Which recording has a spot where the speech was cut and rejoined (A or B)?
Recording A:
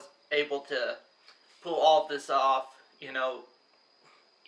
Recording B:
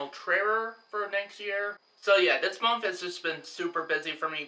B